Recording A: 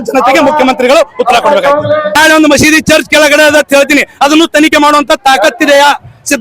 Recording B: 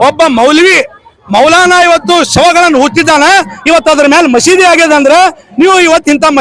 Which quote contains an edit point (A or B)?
A